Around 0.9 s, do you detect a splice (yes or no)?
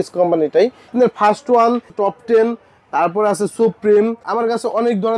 yes